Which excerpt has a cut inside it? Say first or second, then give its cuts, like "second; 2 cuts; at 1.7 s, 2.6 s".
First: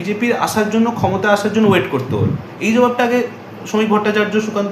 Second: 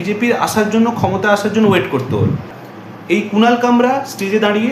second; 1 cut; at 2.5 s